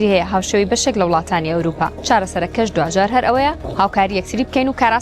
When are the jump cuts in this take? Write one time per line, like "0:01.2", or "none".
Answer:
0:02.0
0:03.6